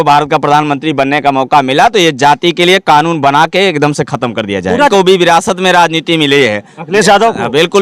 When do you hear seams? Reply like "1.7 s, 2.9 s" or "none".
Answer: 4.9 s